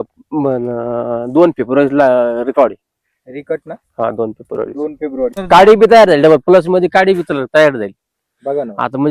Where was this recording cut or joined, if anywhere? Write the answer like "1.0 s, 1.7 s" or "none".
5.4 s